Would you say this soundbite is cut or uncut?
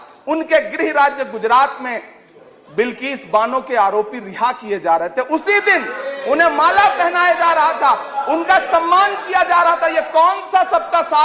uncut